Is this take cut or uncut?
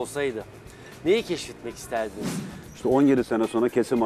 cut